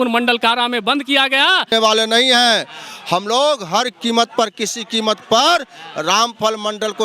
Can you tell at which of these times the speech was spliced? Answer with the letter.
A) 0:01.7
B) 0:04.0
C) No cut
A